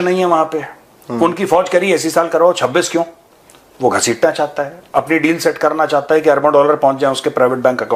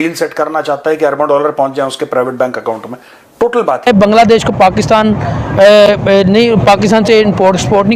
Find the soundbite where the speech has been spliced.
second; 1 cut; at 3.9 s

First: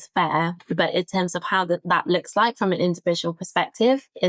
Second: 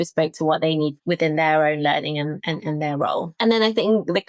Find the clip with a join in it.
second; 2 cuts; at 1.0 s, 3.3 s

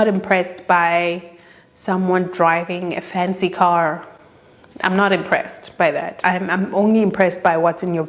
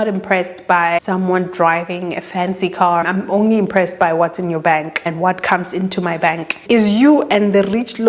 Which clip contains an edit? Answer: second; 4 cuts; at 1.0 s, 3.0 s, 5.0 s, 6.6 s

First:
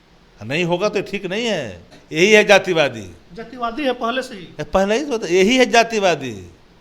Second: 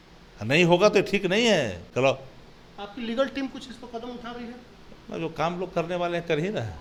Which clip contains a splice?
first; 1 cut; at 1.9 s

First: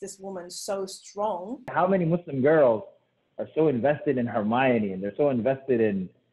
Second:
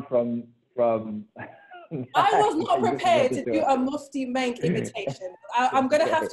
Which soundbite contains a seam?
first; 1 cut; at 1.7 s

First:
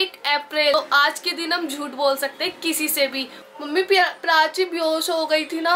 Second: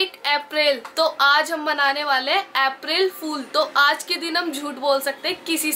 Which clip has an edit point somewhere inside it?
first; 2 cuts; at 0.7 s, 3.3 s

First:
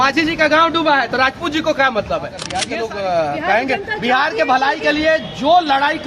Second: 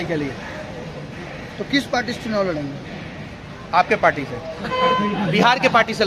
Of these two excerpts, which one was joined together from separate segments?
first; 1 cut; at 2.6 s

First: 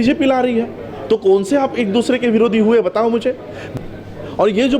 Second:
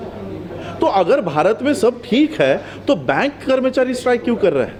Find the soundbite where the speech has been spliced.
first; 1 cut; at 3.6 s

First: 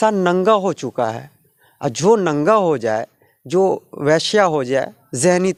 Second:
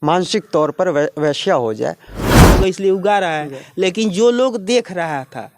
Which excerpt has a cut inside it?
second; 1 cut; at 2.5 s

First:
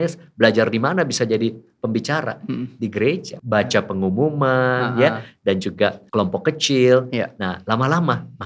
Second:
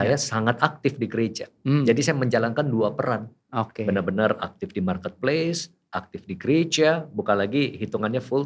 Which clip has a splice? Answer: first; 2 cuts; at 3.3 s, 6.0 s

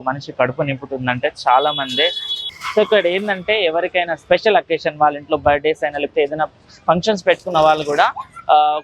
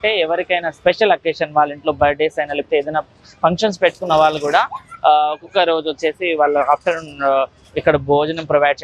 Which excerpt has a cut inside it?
first; 1 cut; at 2.3 s

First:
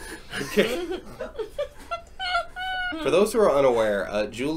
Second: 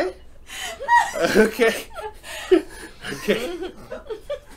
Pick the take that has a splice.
first; 1 cut; at 2.9 s

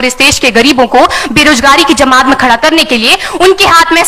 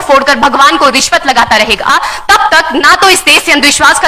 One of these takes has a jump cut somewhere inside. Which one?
second; 1 cut; at 1.9 s

